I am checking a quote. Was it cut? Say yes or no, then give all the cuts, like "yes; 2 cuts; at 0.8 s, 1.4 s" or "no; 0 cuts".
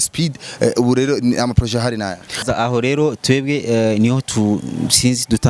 yes; 1 cut; at 2.4 s